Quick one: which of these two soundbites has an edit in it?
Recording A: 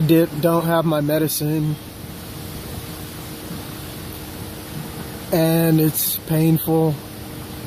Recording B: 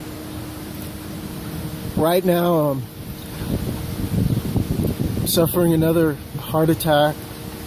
A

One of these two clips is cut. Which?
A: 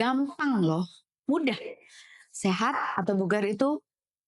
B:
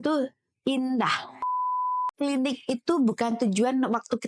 B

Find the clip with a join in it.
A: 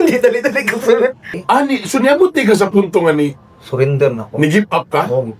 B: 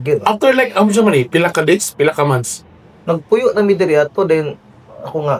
A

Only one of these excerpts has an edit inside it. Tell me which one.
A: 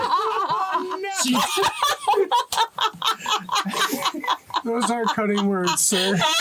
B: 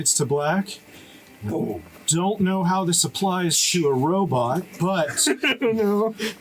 A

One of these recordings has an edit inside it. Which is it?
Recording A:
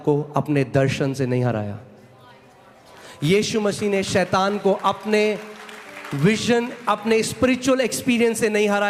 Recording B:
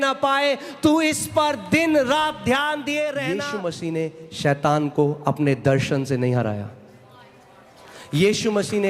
B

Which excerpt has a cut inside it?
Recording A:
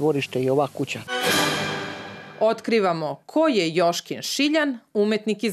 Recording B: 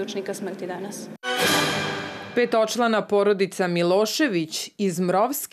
B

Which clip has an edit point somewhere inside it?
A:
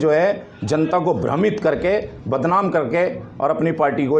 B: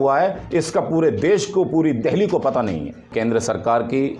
B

